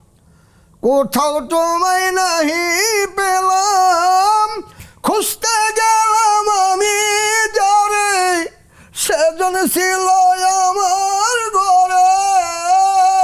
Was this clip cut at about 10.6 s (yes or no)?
no